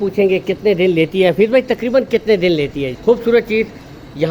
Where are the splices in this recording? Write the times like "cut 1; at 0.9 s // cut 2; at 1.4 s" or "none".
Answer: cut 1; at 3.0 s